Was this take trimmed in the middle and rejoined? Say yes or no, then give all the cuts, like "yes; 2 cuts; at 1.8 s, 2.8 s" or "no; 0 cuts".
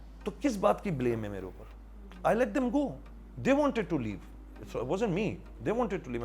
no; 0 cuts